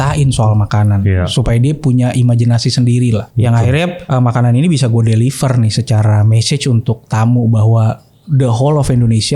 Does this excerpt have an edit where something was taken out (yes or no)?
yes